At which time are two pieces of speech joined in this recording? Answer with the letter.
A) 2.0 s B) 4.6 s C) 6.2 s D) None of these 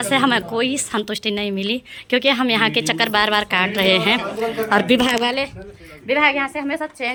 D